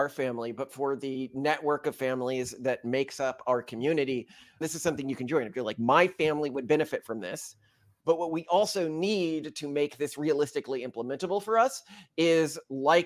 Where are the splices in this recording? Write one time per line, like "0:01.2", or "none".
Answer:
0:07.9